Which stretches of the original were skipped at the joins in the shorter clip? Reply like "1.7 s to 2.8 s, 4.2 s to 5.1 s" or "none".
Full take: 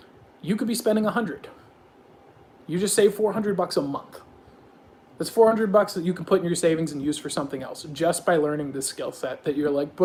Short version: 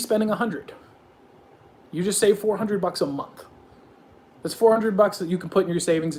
none

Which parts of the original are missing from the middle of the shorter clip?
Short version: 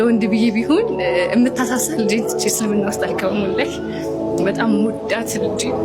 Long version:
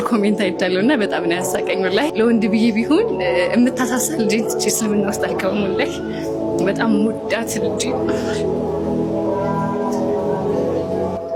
none

